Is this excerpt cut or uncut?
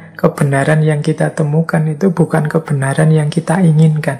uncut